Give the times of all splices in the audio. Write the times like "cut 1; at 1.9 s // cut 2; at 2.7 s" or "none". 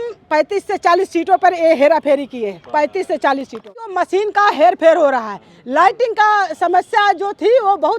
cut 1; at 3.9 s